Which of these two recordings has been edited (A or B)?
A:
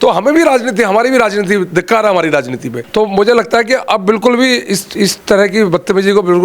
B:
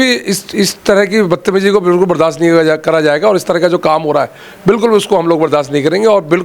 A